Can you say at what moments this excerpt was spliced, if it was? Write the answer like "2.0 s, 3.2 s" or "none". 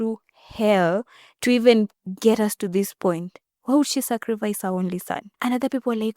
5.2 s